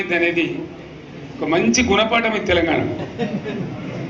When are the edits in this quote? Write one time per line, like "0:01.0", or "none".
none